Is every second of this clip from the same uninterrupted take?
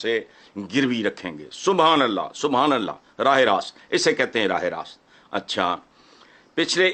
yes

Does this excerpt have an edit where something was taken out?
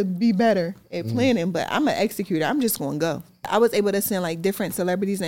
yes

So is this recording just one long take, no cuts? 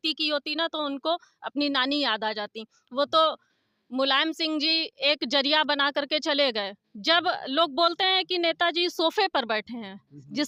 yes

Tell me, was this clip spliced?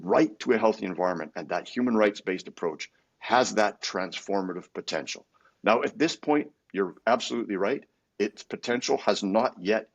no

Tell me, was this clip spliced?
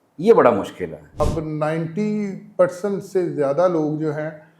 yes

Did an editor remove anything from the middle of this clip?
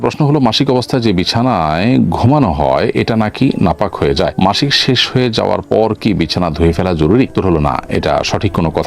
no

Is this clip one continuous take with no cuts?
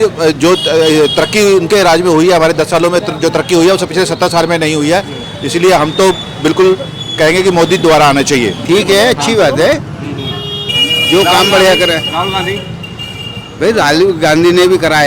no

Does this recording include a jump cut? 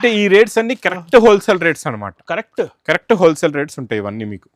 no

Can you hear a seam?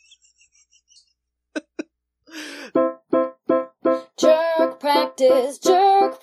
yes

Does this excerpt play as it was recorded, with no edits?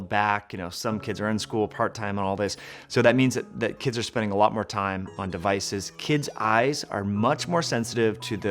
yes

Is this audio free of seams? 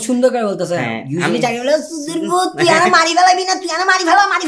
yes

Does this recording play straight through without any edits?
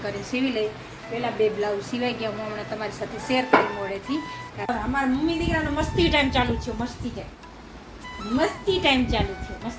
no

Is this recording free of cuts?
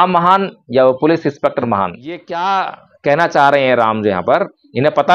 no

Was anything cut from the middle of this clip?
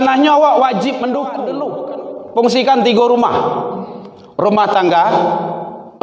yes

